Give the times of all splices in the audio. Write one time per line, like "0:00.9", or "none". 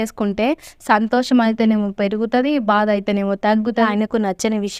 0:03.9